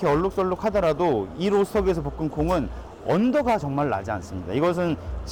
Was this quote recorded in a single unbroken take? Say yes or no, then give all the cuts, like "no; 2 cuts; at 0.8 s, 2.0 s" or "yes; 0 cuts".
yes; 0 cuts